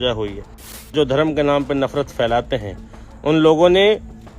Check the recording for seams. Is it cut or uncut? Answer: cut